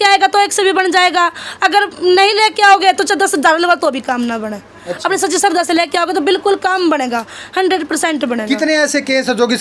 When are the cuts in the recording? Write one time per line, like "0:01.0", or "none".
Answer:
none